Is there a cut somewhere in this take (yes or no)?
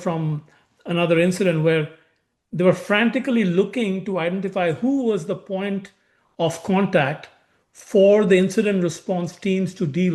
no